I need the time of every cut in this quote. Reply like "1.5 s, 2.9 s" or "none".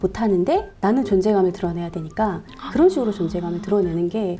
2.6 s